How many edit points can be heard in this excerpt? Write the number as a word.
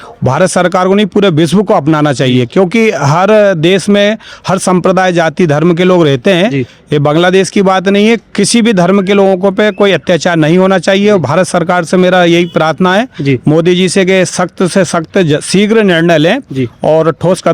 zero